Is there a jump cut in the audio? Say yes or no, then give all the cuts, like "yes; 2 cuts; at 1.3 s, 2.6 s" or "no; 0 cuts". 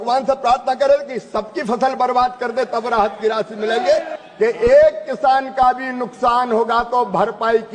yes; 1 cut; at 4.2 s